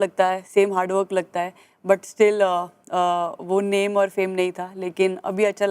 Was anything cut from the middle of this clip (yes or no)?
no